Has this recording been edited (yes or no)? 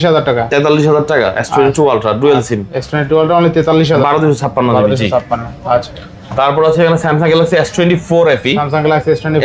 no